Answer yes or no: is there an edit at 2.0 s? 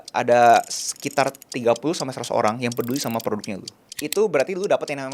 no